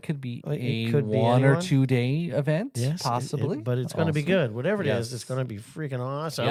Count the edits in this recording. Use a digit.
0